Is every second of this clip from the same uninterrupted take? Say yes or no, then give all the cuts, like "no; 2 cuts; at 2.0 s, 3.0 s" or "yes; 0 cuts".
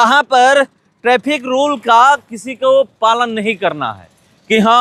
yes; 0 cuts